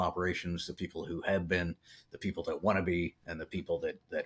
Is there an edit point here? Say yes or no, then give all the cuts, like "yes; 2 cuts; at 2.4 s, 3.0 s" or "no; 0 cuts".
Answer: no; 0 cuts